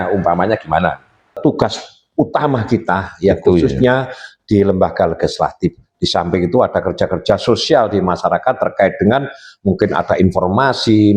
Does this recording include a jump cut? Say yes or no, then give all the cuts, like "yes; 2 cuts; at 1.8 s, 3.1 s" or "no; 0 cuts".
yes; 1 cut; at 1.4 s